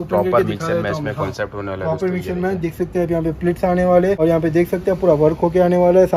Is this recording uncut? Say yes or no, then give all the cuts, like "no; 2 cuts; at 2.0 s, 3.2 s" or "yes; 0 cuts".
no; 1 cut; at 4.2 s